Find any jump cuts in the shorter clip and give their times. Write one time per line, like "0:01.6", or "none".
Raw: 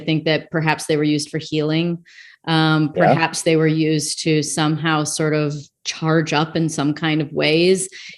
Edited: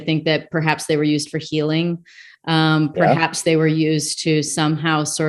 none